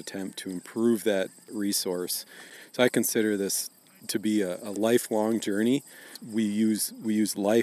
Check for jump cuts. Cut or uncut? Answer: cut